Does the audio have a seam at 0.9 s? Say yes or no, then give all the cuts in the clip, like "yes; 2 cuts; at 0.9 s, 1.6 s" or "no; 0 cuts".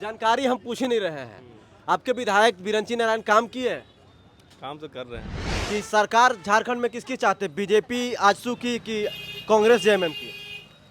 no; 1 cut; at 5.5 s